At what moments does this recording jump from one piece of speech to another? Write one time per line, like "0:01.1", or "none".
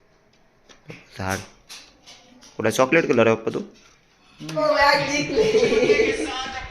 0:04.6